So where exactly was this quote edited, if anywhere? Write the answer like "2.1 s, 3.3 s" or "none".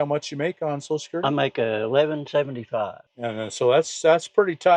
none